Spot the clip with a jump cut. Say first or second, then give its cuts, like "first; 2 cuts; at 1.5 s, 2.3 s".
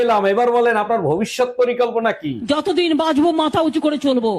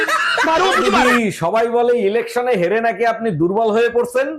second; 1 cut; at 1.1 s